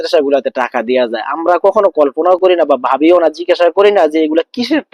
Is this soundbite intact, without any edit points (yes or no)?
yes